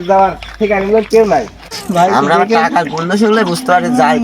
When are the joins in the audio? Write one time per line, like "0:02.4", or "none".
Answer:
0:01.8